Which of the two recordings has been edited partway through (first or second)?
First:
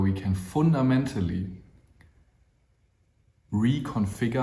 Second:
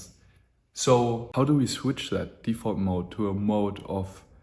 second